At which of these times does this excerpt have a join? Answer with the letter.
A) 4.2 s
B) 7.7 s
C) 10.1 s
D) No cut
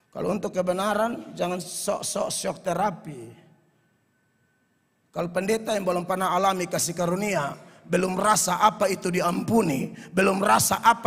D